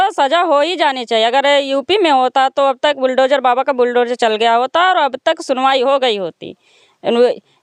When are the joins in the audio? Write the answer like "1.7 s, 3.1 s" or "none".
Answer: none